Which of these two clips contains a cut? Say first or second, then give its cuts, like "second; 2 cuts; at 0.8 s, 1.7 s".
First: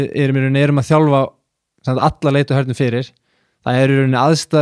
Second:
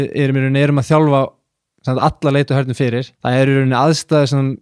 second; 1 cut; at 3.1 s